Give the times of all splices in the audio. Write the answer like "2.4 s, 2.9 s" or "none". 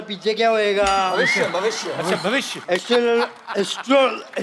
2.7 s